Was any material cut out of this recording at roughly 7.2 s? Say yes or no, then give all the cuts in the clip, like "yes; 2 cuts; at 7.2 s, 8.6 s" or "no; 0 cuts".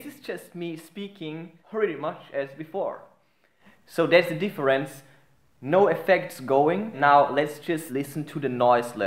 no; 0 cuts